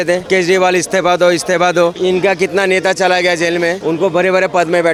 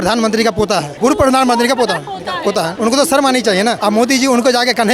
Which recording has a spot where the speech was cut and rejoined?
second; 3 cuts; at 0.9 s, 2.7 s, 3.8 s

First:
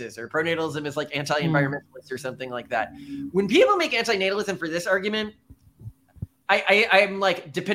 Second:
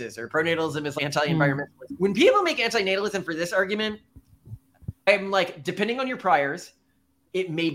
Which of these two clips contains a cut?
second; 3 cuts; at 0.9 s, 1.8 s, 5.1 s

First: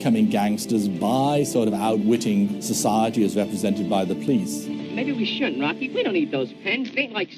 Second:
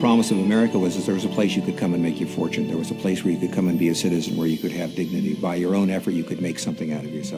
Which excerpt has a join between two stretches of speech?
first; 1 cut; at 1.7 s

